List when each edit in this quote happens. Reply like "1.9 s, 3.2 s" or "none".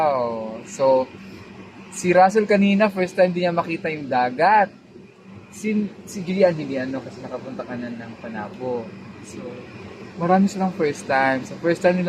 none